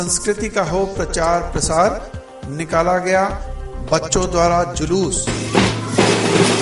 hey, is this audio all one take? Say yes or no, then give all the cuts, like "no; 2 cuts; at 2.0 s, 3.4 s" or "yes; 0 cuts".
yes; 0 cuts